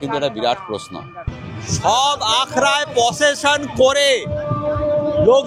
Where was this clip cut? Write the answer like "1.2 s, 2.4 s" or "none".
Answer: 1.4 s